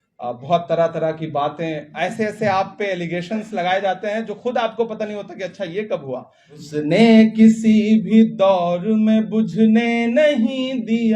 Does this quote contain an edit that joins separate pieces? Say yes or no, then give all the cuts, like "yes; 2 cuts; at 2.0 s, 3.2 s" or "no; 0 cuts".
yes; 1 cut; at 6.6 s